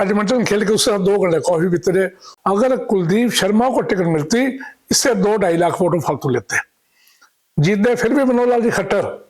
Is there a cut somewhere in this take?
yes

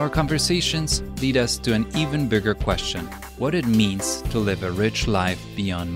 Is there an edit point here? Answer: no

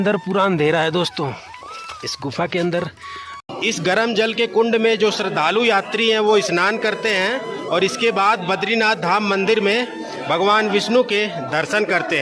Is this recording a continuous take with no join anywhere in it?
no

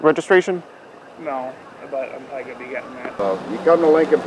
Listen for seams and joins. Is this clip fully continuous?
no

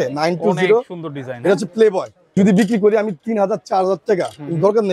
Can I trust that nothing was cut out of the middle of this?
no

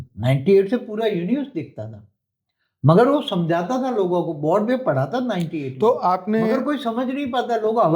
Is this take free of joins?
yes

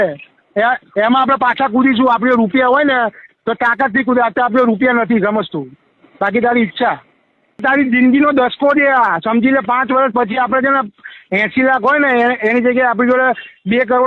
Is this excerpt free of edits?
no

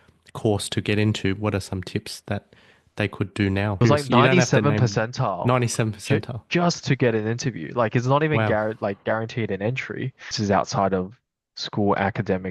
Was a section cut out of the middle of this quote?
yes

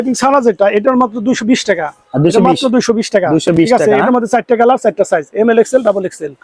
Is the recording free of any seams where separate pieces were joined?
yes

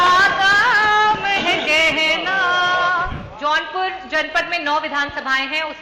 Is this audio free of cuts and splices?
no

